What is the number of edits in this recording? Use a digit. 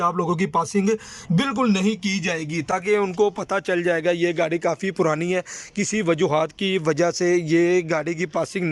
0